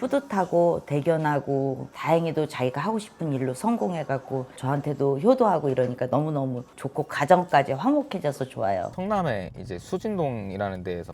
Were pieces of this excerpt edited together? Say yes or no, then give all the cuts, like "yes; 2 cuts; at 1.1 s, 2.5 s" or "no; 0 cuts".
yes; 2 cuts; at 1.9 s, 8.9 s